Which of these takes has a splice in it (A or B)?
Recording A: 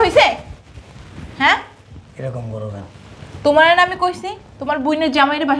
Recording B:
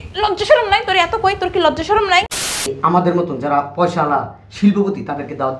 B